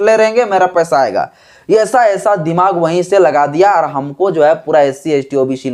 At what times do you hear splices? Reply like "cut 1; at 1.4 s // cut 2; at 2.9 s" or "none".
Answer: none